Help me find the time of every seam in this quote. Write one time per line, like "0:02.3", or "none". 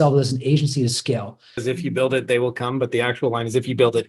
0:01.6